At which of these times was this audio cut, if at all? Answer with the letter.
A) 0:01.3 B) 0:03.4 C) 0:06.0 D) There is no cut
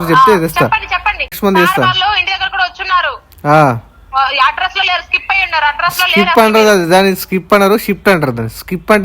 A